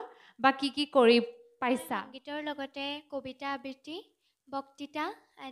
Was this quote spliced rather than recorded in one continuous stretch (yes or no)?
yes